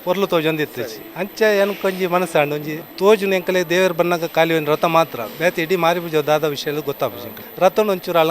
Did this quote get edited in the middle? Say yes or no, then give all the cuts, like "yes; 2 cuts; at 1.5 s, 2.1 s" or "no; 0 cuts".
yes; 2 cuts; at 2.8 s, 7.4 s